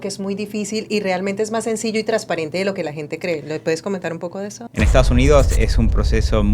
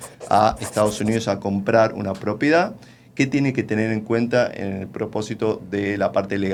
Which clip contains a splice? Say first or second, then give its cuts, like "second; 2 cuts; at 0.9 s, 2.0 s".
first; 1 cut; at 4.6 s